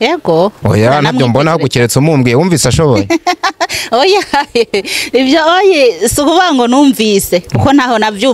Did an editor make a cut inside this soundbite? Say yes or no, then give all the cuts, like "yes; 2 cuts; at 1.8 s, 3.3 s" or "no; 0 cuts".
no; 0 cuts